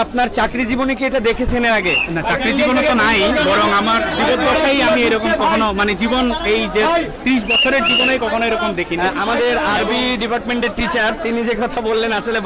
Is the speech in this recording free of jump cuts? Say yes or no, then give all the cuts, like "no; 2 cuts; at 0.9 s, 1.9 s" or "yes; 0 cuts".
yes; 0 cuts